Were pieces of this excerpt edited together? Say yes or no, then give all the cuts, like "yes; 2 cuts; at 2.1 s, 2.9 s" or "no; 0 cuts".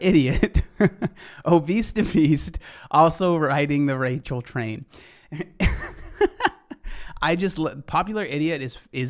no; 0 cuts